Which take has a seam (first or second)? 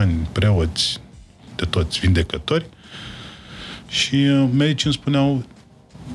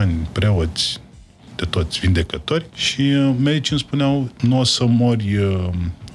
second